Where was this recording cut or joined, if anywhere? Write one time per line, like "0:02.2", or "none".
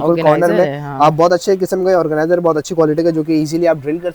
none